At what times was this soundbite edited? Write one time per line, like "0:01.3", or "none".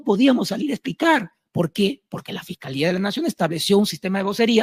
none